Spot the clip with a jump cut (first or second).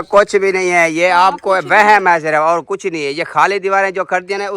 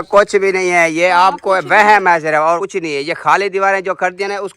second